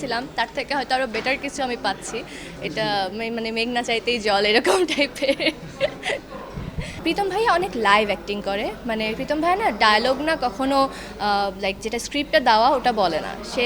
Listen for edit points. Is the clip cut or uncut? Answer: cut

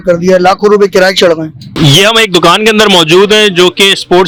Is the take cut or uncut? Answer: uncut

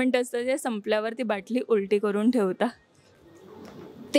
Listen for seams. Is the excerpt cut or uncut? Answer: uncut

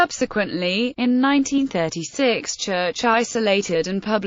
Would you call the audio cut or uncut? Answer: cut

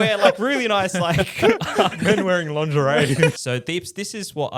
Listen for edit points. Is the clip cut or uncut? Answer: cut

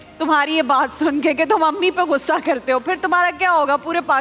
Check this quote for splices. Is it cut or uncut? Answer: uncut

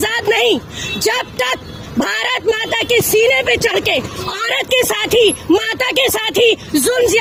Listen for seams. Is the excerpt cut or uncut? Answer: uncut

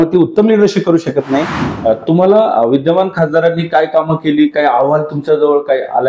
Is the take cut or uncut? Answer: cut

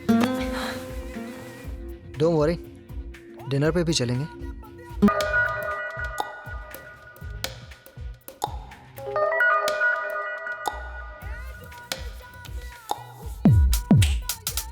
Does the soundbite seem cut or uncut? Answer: cut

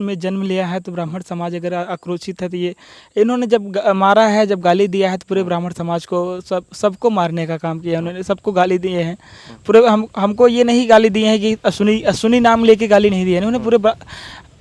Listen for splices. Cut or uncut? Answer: uncut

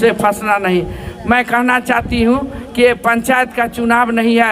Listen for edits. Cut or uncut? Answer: uncut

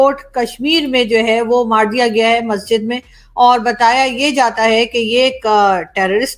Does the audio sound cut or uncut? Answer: uncut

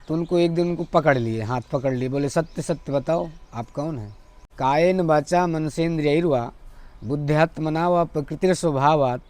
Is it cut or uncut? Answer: cut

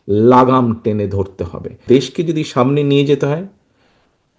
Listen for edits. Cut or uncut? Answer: cut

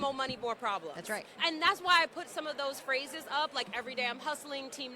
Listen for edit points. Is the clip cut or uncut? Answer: uncut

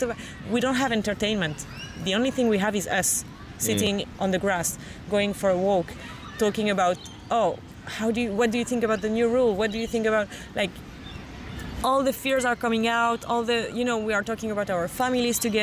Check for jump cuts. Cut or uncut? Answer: uncut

